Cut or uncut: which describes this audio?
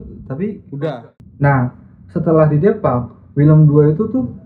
cut